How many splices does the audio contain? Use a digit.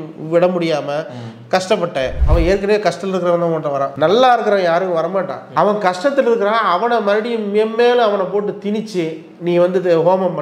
2